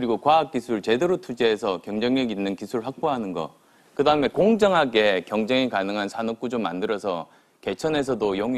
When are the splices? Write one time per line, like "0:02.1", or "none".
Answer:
0:03.2